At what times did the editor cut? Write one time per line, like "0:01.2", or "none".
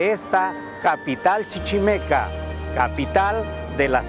none